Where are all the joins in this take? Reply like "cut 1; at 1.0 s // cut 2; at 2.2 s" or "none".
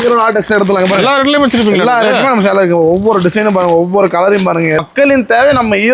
cut 1; at 4.8 s